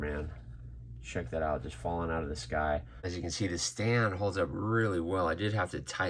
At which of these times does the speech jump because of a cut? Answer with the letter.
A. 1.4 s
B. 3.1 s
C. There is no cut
B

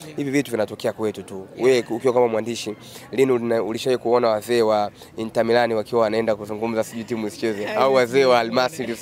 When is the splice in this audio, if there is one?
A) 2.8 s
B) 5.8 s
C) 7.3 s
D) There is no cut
D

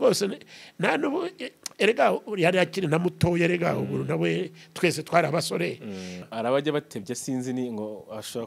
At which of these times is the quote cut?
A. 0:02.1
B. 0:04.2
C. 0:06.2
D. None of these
C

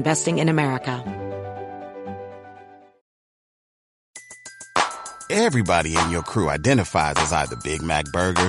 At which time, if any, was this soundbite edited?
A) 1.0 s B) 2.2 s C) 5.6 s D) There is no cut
A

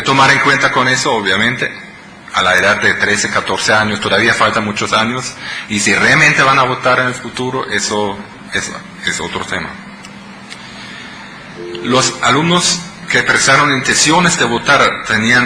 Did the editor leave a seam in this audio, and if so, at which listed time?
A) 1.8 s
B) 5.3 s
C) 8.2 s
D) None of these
C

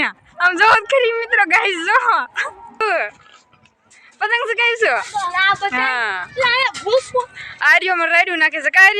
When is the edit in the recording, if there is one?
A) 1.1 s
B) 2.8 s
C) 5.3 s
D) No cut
B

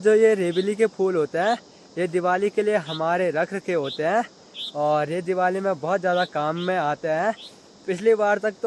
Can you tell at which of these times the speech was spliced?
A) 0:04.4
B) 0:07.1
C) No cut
C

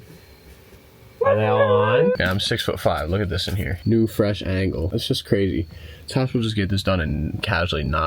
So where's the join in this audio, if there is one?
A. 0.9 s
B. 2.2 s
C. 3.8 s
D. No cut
B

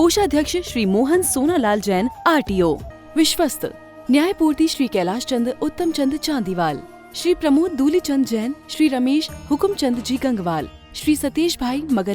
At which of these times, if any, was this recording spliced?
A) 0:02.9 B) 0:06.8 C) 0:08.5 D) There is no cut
A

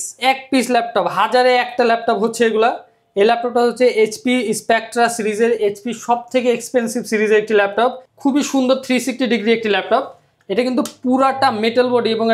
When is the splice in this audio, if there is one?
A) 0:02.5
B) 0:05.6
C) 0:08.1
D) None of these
C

